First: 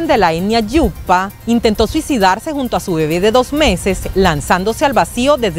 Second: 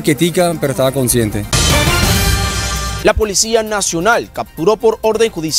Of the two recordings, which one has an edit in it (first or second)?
second